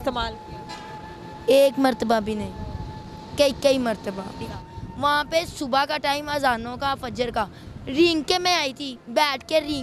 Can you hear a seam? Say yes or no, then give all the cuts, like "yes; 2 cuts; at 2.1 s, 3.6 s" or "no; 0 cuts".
yes; 1 cut; at 4.5 s